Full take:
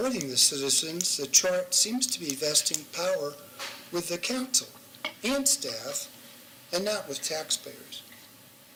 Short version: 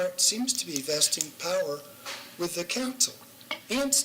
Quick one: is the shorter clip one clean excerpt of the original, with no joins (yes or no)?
yes